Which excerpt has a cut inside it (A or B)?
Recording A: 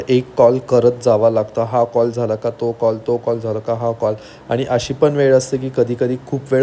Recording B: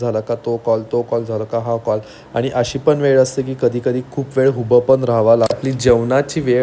B